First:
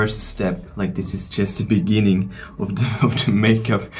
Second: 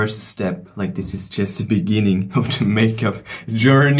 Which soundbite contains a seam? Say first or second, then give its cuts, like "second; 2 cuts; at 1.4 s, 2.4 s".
second; 1 cut; at 2.3 s